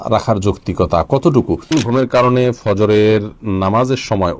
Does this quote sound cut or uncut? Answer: cut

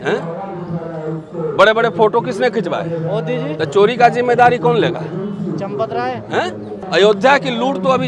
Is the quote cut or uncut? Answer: cut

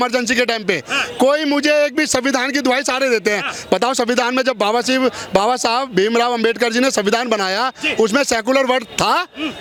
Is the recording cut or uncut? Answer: uncut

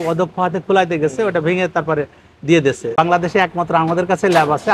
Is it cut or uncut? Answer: cut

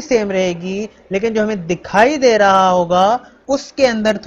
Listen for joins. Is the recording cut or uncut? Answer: cut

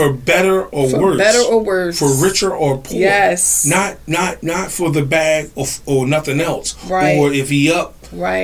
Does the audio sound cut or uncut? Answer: uncut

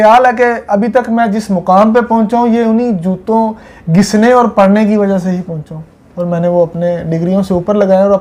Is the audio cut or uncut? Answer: uncut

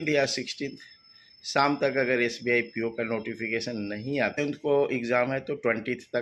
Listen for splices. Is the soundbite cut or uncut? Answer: cut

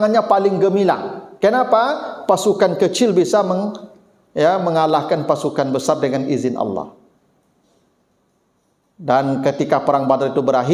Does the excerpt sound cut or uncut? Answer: uncut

